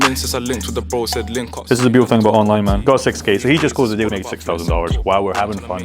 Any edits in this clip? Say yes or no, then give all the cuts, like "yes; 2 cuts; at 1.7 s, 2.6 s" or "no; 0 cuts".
yes; 3 cuts; at 1.6 s, 2.8 s, 4.1 s